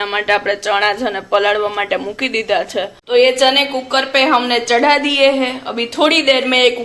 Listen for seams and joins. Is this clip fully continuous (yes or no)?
no